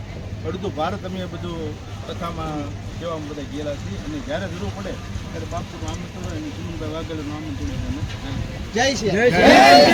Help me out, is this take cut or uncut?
uncut